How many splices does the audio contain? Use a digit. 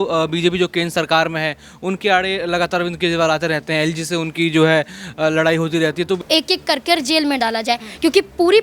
1